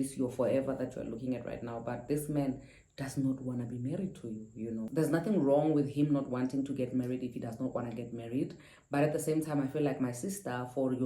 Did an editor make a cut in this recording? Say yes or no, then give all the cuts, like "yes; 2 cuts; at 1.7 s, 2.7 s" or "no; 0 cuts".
yes; 1 cut; at 4.8 s